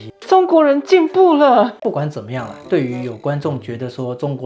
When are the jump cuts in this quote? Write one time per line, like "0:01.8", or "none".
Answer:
0:01.8